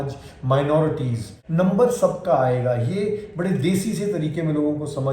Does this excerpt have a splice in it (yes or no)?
yes